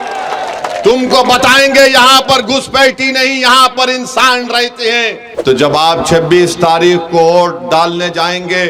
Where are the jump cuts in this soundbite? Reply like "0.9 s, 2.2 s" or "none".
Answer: 5.2 s